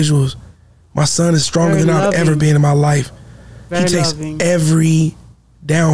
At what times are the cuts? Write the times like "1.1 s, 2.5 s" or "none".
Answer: none